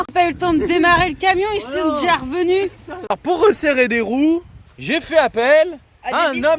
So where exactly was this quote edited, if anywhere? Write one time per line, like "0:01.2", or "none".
0:02.9